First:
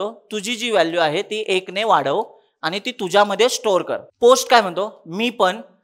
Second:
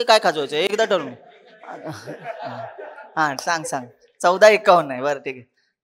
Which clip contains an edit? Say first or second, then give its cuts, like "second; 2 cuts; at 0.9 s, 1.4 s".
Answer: first; 1 cut; at 4.0 s